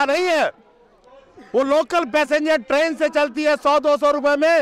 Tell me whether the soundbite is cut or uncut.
uncut